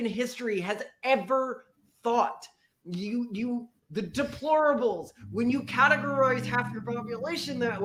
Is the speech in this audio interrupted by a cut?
no; 0 cuts

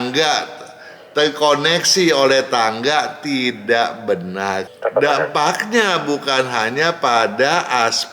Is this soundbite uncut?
no; 1 cut; at 4.7 s

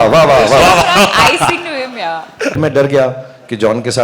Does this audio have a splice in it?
yes; 1 cut; at 2.6 s

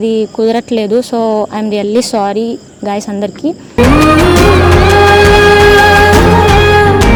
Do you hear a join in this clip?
no; 0 cuts

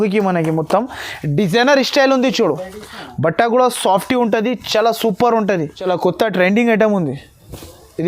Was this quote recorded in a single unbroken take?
no; 1 cut; at 5.9 s

